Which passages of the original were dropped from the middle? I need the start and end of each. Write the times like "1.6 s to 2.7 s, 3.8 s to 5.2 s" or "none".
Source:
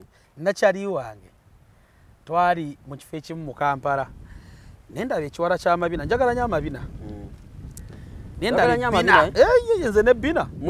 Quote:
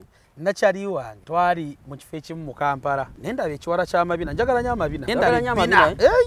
1.2 s to 2.2 s, 4.2 s to 4.9 s, 6.7 s to 8.4 s